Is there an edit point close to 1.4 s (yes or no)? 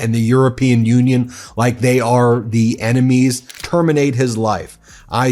no